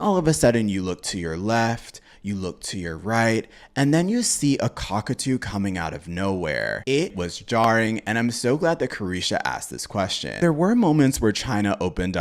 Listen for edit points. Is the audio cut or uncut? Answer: uncut